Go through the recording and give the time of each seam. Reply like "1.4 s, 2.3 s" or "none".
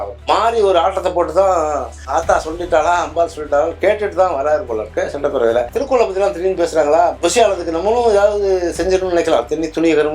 5.7 s, 7.2 s